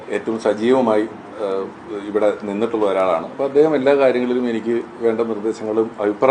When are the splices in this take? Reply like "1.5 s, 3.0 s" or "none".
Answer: none